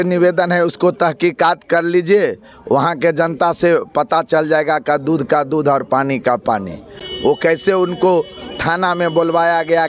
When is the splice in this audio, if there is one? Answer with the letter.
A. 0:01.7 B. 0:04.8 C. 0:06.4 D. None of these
D